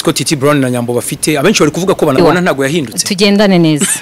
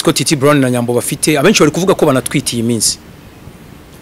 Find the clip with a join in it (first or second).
first